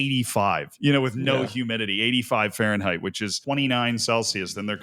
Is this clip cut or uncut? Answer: cut